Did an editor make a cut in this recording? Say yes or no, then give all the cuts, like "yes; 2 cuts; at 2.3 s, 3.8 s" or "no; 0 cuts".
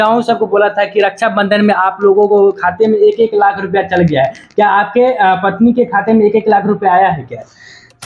no; 0 cuts